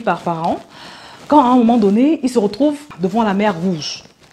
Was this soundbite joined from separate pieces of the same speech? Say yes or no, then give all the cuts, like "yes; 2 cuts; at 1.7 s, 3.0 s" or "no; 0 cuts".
yes; 1 cut; at 2.8 s